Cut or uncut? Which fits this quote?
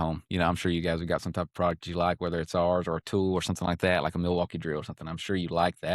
uncut